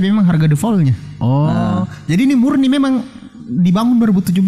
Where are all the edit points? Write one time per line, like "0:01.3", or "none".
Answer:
0:01.1